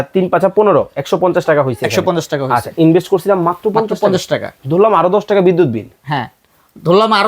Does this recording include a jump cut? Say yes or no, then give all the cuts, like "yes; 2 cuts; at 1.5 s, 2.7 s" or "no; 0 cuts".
no; 0 cuts